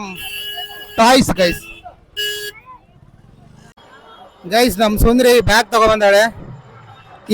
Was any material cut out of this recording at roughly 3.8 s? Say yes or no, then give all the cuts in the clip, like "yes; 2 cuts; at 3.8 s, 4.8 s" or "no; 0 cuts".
yes; 1 cut; at 3.8 s